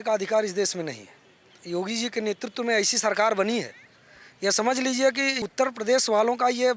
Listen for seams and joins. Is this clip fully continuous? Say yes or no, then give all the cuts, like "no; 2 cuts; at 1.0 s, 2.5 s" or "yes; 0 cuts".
no; 2 cuts; at 1.6 s, 5.4 s